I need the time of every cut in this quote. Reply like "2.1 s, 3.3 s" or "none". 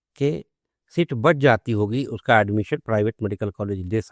none